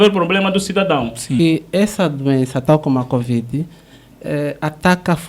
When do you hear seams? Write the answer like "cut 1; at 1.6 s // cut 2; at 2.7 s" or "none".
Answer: cut 1; at 1.4 s